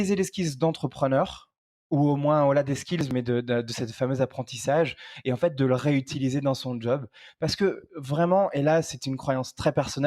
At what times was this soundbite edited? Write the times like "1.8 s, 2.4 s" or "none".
none